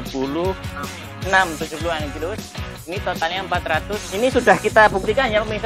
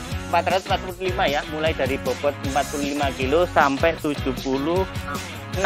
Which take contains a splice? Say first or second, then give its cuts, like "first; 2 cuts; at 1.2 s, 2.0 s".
first; 1 cut; at 4.0 s